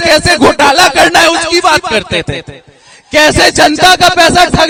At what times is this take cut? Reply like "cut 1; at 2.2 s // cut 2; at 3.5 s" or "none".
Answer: none